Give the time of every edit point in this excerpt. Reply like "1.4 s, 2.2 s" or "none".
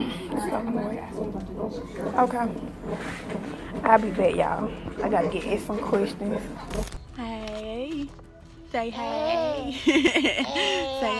6.8 s